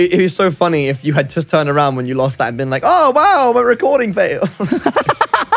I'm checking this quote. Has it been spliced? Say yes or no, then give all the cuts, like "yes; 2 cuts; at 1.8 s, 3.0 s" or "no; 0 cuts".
yes; 1 cut; at 4.7 s